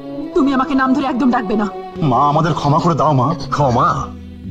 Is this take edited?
yes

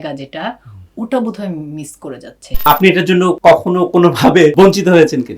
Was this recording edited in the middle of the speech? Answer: yes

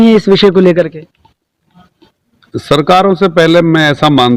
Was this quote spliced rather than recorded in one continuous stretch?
no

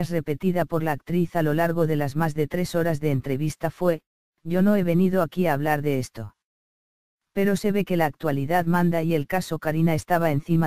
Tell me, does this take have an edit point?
no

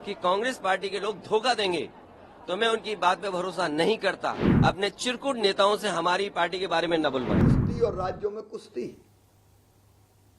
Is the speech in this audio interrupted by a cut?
yes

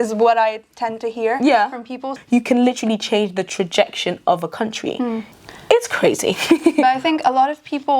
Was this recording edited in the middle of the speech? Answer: yes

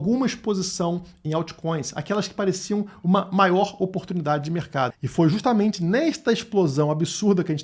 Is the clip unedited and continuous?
no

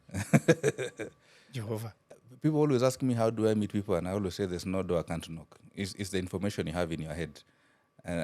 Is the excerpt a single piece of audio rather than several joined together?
no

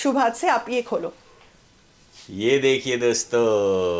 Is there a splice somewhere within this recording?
no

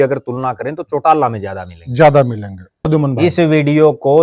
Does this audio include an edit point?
yes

